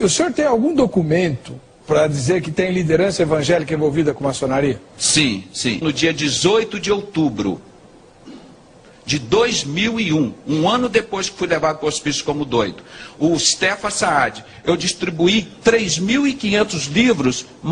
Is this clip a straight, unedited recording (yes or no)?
yes